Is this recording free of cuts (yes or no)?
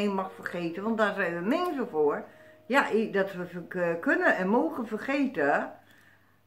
yes